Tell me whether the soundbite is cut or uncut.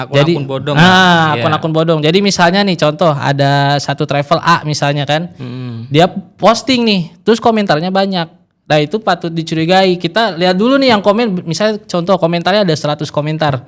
uncut